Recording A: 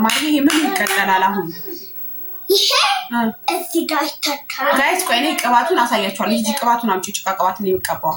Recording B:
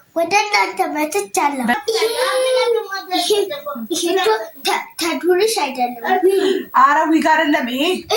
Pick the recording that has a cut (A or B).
B